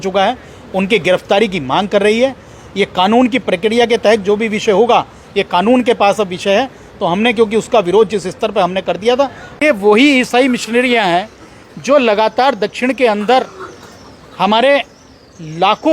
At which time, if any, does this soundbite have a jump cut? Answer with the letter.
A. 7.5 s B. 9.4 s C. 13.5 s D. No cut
B